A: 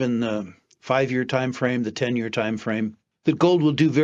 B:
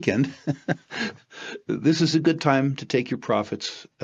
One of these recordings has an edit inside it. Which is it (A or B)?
A